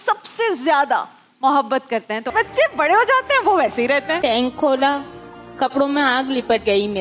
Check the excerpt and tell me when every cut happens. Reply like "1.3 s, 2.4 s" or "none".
2.3 s, 4.2 s